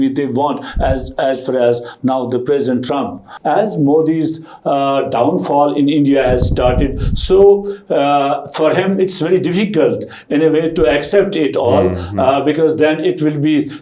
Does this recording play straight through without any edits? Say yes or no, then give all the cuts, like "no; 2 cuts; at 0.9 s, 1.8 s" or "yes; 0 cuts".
no; 1 cut; at 3.3 s